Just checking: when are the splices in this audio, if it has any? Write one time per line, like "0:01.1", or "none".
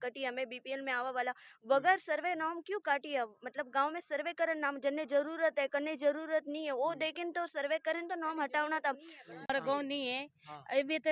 0:09.5